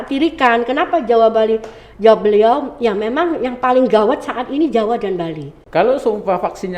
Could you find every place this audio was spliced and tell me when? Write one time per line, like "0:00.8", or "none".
0:05.6